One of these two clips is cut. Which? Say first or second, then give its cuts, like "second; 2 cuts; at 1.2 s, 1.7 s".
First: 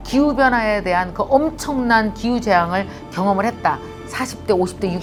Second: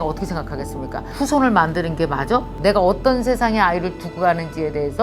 second; 2 cuts; at 1.1 s, 2.5 s